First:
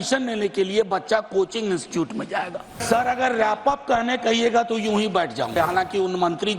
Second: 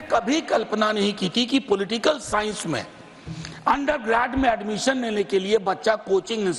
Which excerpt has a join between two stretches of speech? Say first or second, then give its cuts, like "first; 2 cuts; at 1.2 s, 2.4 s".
first; 2 cuts; at 2.8 s, 5.5 s